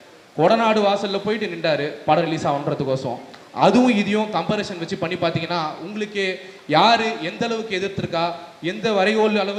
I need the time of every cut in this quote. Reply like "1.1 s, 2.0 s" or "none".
none